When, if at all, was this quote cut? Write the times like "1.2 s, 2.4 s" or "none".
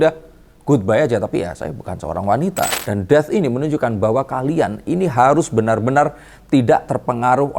2.7 s